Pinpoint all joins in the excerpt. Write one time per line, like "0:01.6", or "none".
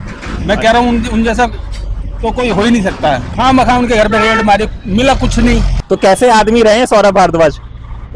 0:03.3
0:05.7